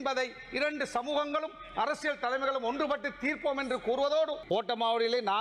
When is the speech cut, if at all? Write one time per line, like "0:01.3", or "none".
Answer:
0:04.4